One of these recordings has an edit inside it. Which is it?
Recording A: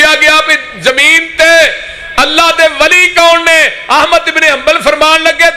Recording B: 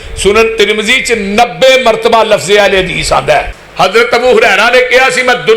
B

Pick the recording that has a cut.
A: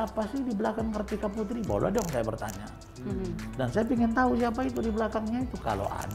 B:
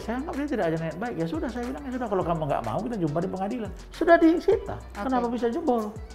B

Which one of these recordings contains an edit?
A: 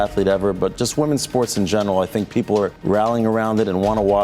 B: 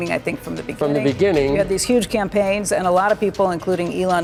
A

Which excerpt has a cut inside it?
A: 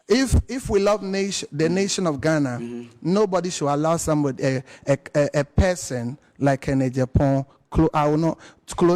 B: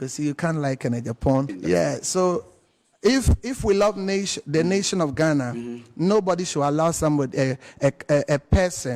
B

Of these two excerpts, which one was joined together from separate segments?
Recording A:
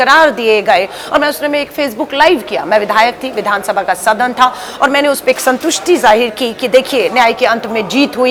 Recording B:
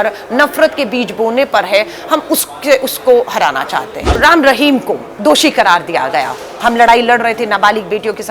B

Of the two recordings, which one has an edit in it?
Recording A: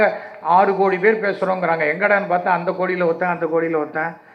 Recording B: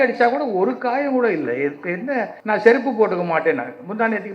B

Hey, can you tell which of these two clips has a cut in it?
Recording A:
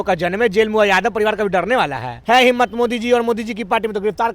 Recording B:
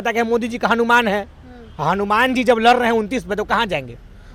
A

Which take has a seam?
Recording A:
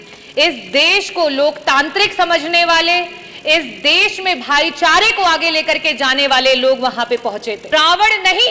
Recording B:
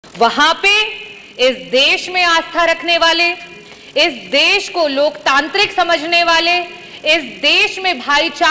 A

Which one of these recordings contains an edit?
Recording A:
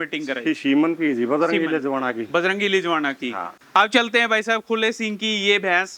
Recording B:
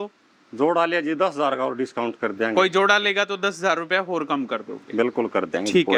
A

